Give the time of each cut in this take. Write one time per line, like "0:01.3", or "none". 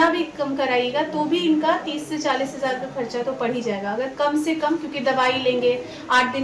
none